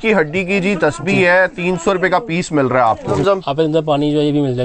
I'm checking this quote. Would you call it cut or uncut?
cut